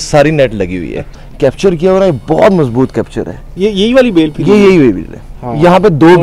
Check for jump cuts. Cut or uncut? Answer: cut